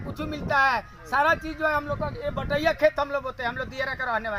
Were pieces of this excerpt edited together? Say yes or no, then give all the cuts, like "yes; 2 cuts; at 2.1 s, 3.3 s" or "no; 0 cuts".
no; 0 cuts